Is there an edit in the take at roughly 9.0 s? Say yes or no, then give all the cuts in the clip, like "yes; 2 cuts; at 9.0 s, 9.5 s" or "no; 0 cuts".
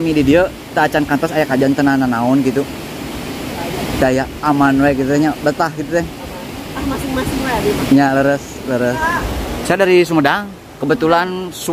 yes; 1 cut; at 9.0 s